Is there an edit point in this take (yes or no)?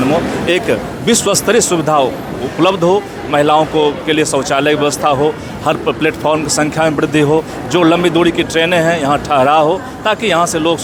no